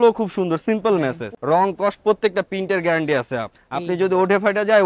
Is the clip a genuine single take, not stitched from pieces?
no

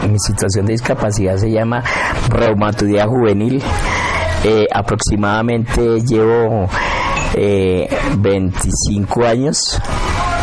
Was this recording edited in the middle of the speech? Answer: no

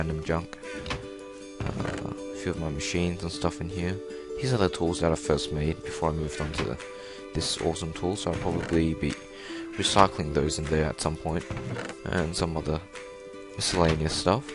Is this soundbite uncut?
yes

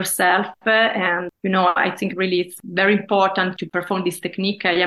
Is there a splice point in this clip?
yes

